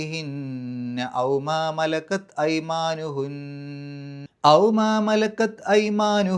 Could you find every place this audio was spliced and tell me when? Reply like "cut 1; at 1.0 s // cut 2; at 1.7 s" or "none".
cut 1; at 4.2 s